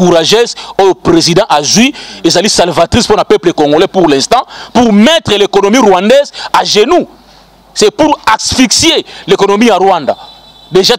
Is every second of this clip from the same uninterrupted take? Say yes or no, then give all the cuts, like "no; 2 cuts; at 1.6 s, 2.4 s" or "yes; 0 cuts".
yes; 0 cuts